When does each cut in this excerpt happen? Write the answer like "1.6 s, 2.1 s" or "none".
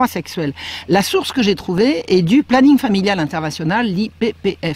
3.7 s